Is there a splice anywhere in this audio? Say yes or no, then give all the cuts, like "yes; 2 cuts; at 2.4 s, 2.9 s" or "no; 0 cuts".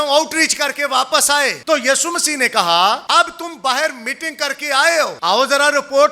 yes; 3 cuts; at 1.6 s, 3.0 s, 5.1 s